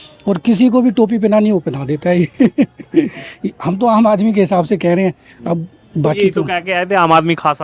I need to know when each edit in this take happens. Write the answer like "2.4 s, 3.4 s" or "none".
none